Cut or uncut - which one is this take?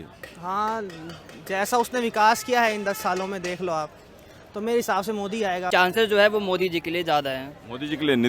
cut